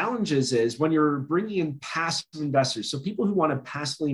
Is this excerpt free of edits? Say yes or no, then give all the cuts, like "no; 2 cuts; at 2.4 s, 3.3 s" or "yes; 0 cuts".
yes; 0 cuts